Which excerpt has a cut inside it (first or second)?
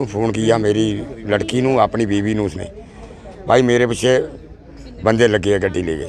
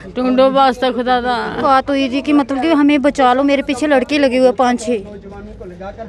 second